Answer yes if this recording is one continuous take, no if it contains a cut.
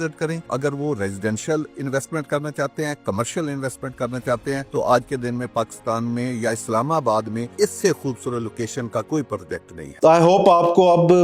yes